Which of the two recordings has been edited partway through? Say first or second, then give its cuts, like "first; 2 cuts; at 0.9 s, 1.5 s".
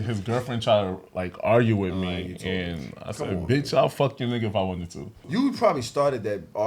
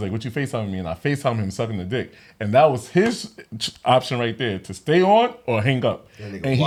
first; 1 cut; at 5.2 s